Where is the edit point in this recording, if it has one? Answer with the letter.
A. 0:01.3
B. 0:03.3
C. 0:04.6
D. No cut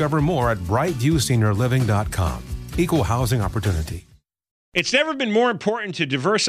C